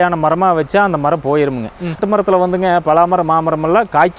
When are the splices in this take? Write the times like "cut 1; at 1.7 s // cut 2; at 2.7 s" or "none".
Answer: cut 1; at 2.0 s